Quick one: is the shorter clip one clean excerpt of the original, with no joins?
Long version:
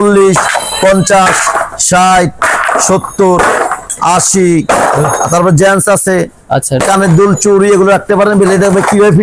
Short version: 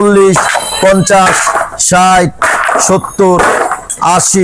yes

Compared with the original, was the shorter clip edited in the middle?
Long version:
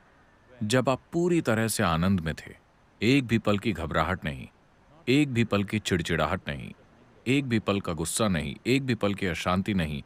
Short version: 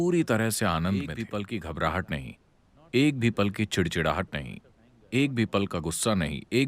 yes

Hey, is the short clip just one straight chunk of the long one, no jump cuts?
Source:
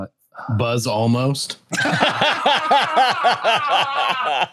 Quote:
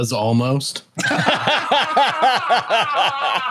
yes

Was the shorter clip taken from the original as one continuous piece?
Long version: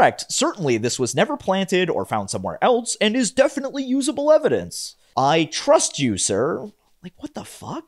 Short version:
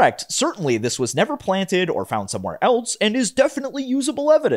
yes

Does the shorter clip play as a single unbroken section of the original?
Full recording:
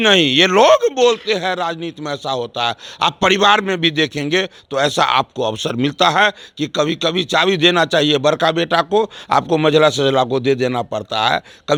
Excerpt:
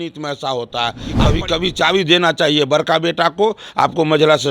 no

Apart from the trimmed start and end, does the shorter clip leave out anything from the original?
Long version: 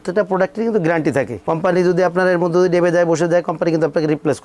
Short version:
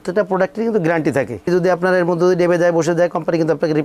yes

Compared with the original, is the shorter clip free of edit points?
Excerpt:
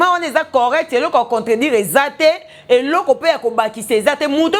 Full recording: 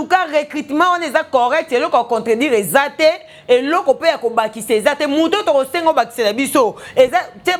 yes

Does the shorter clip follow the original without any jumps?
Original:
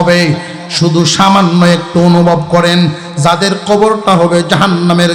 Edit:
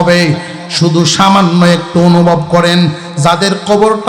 yes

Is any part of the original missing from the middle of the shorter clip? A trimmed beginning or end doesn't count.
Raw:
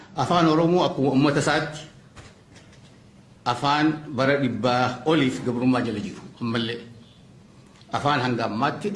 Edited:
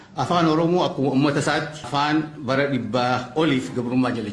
yes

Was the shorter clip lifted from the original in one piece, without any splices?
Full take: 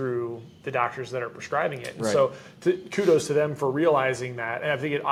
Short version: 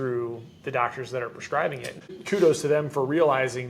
no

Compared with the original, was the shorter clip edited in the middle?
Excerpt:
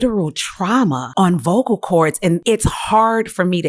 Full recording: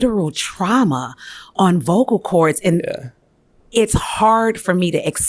yes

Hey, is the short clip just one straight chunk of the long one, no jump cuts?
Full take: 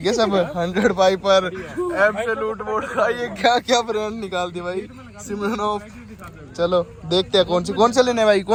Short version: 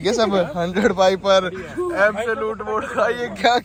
yes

